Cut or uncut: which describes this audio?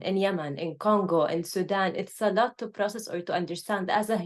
uncut